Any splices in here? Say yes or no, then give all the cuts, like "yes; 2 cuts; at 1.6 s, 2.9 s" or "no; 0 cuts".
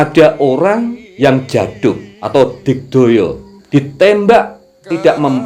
yes; 3 cuts; at 1.0 s, 2.1 s, 3.5 s